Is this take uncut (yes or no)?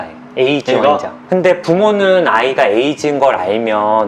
no